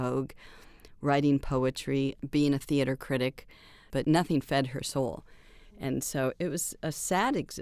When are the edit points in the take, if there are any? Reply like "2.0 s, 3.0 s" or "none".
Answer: 2.2 s, 3.8 s, 6.4 s